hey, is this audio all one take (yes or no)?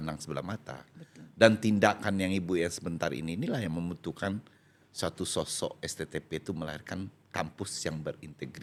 yes